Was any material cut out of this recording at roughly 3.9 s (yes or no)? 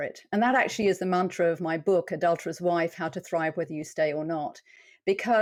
no